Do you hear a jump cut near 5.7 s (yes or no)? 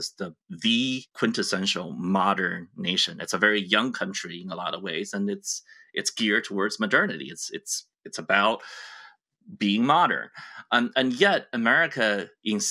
no